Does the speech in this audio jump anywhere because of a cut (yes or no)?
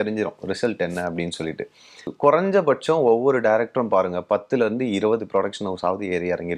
yes